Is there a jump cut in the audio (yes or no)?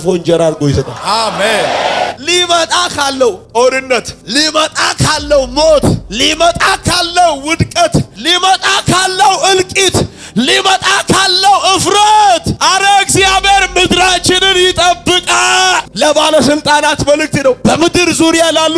yes